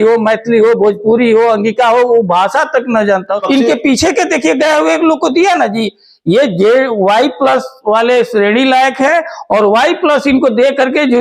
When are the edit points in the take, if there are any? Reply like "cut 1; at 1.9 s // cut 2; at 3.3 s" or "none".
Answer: cut 1; at 3.4 s